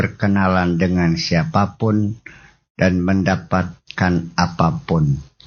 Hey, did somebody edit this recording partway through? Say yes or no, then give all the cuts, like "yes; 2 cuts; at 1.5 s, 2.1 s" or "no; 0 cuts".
no; 0 cuts